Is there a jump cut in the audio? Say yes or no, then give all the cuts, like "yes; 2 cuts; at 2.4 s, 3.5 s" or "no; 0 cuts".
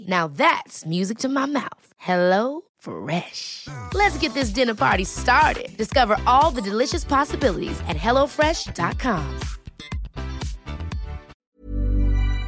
yes; 1 cut; at 11.3 s